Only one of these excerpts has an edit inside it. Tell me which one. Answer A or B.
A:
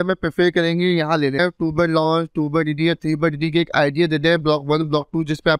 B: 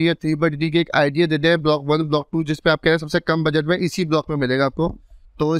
A